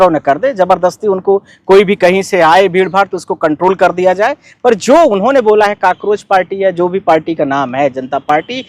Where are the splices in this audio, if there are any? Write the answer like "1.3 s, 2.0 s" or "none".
none